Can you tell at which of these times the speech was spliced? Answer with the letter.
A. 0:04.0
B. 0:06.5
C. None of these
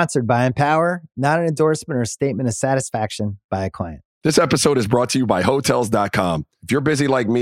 A